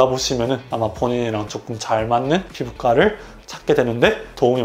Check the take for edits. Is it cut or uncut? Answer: uncut